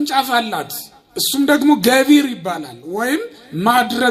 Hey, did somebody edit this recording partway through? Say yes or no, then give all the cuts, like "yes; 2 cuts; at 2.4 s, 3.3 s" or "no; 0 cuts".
no; 0 cuts